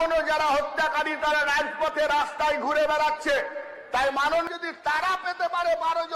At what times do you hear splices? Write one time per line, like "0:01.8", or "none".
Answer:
0:04.5